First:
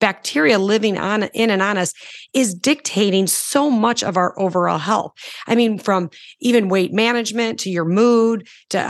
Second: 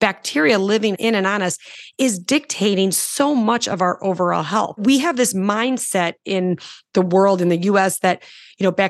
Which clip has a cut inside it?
second; 2 cuts; at 1.0 s, 4.8 s

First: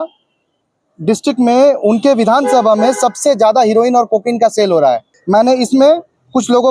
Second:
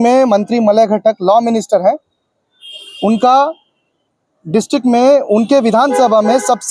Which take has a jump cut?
first; 1 cut; at 5.1 s

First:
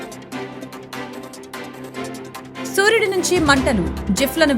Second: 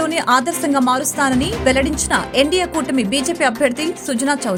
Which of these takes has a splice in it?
first; 1 cut; at 1.9 s

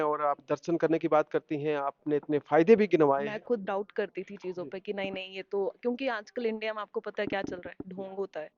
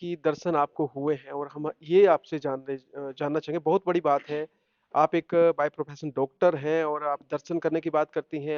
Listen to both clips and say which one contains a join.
first; 1 cut; at 3.3 s

